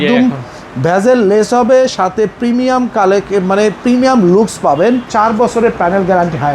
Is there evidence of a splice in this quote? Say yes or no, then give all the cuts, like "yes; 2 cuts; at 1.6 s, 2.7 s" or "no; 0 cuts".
yes; 1 cut; at 5.1 s